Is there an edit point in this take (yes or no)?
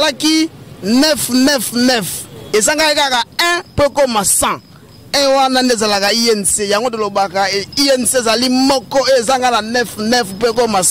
no